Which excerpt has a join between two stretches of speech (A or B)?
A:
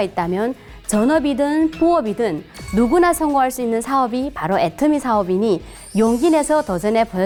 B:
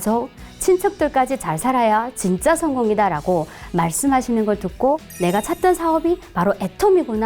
B